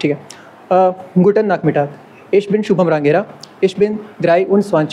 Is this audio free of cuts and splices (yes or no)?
yes